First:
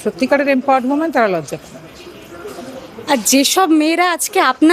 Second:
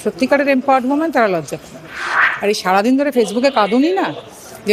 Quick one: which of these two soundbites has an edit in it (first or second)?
second